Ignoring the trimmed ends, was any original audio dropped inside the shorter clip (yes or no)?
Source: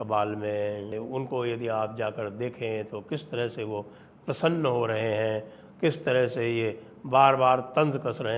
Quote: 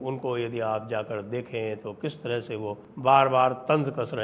yes